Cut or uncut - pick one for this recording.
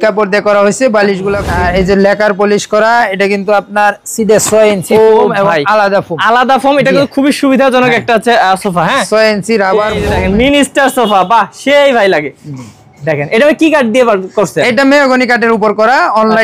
cut